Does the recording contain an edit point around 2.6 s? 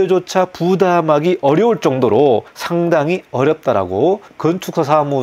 yes; 2 cuts; at 2.6 s, 4.3 s

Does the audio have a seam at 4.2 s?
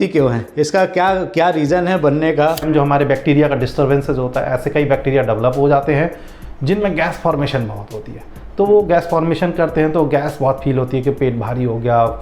no; 1 cut; at 2.6 s

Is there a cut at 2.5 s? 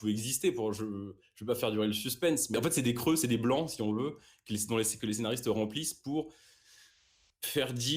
yes; 1 cut; at 2.5 s

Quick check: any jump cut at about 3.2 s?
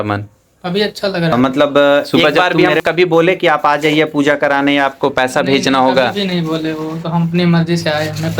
no; 1 cut; at 1.3 s

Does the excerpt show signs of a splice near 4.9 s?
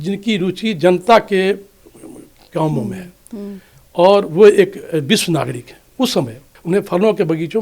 no; 1 cut; at 6.5 s

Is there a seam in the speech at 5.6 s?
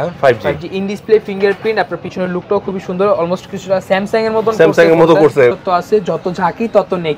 yes; 1 cut; at 5.6 s

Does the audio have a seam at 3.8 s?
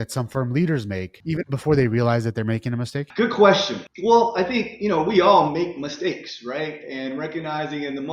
yes; 3 cuts; at 1.1 s, 3.0 s, 3.8 s

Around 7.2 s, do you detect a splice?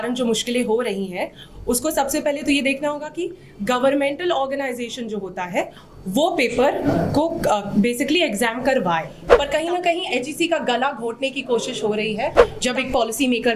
no; 2 cuts; at 9.2 s, 12.5 s

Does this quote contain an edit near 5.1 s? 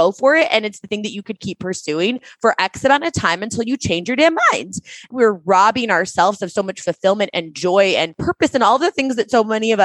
yes; 2 cuts; at 5.1 s, 8.2 s

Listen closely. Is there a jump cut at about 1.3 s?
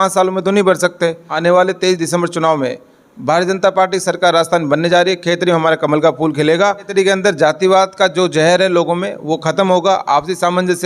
yes; 2 cuts; at 1.3 s, 6.9 s

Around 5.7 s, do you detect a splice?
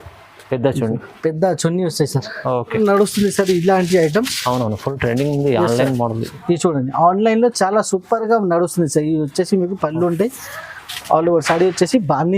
no; 1 cut; at 2.7 s

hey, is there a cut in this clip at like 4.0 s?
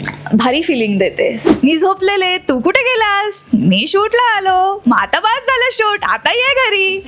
no; 1 cut; at 1.4 s

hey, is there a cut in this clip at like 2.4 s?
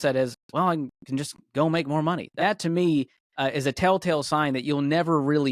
yes; 1 cut; at 2.4 s

